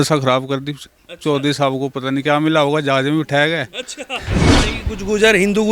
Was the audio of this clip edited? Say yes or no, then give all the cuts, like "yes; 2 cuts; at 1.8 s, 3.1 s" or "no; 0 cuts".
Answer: yes; 1 cut; at 4.3 s